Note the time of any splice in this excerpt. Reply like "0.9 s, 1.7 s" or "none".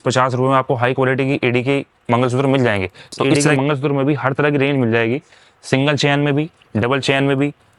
3.3 s